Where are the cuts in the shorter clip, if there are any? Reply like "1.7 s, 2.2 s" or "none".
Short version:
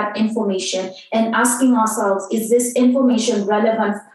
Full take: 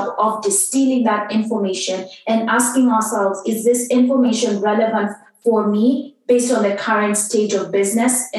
none

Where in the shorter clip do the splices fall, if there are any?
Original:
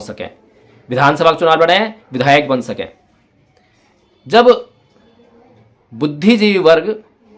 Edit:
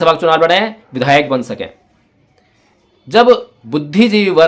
3.5 s

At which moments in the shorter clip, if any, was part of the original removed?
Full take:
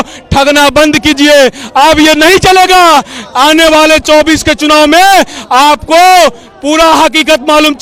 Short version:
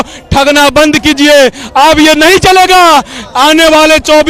none

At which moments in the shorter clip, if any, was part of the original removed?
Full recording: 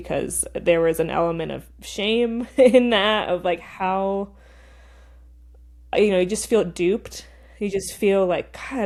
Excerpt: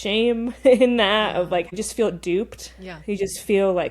1.8 s

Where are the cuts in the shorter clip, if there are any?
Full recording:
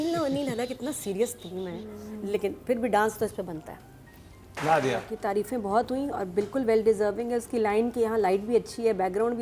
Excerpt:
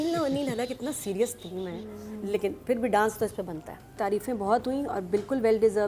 3.9 s

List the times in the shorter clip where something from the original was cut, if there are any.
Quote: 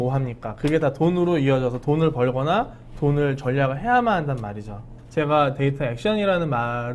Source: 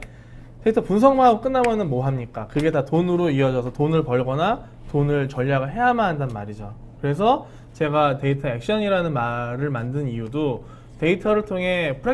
4.9 s

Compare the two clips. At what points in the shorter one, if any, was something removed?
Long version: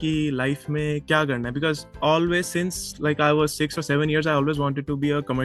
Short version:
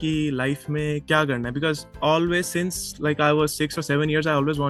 none

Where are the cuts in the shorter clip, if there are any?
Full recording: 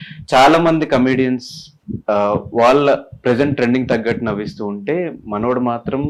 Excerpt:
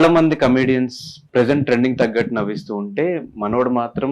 1.2 s

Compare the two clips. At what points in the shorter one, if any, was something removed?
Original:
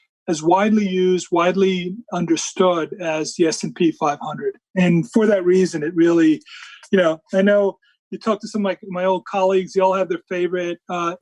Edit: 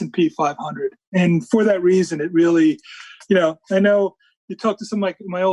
none

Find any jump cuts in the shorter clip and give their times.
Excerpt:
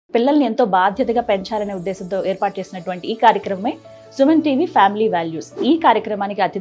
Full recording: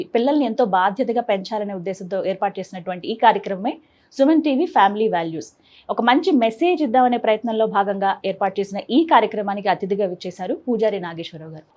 5.5 s

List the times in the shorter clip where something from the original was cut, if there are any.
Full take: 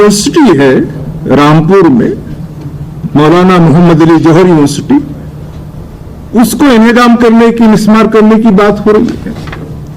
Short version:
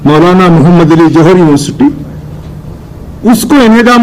none

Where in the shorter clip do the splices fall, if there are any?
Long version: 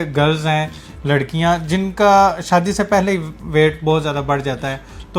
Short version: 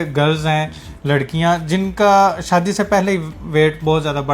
none

